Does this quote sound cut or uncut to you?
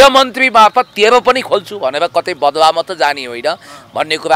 uncut